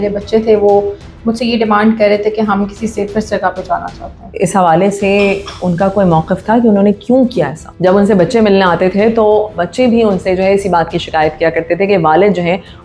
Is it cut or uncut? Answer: cut